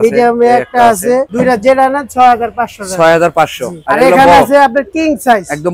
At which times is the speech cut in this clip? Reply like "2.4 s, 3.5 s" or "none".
none